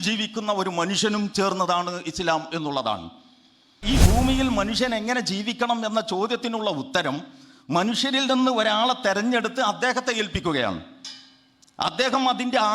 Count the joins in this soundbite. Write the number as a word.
one